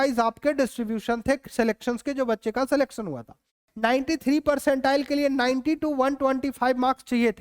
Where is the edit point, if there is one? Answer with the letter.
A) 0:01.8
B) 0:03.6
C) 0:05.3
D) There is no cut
B